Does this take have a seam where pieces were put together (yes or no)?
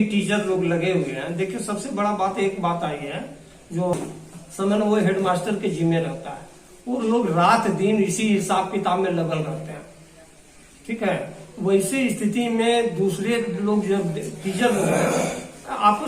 yes